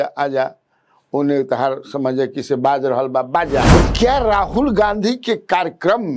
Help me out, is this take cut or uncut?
cut